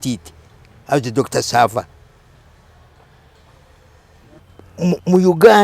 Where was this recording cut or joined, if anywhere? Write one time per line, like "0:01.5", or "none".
0:04.4